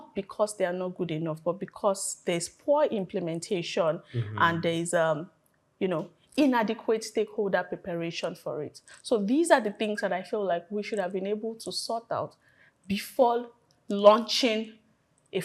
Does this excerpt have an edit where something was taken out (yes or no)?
no